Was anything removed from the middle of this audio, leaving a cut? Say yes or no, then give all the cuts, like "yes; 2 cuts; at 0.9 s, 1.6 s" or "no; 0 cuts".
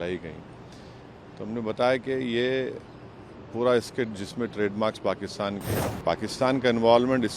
yes; 1 cut; at 5.7 s